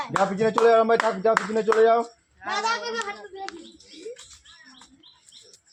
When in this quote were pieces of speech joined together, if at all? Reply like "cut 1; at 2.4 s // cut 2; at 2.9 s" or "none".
none